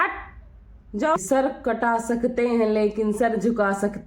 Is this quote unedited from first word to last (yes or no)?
no